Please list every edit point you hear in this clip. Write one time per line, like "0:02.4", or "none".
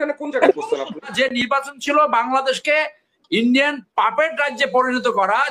0:01.1